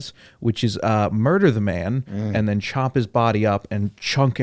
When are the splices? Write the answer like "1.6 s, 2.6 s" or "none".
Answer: none